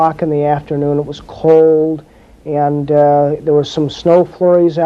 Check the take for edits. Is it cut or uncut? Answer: cut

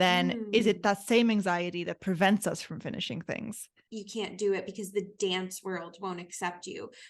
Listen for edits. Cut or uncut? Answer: cut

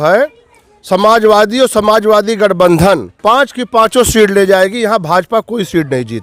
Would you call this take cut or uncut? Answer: uncut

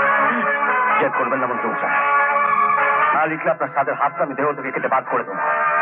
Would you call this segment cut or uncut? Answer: uncut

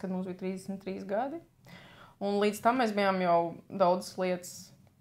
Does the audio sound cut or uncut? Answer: uncut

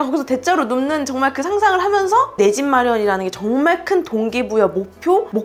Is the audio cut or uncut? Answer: uncut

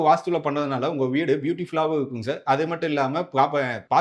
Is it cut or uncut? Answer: uncut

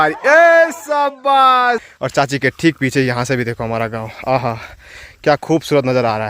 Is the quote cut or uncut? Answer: cut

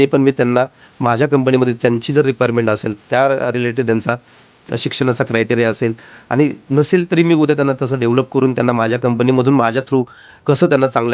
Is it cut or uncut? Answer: uncut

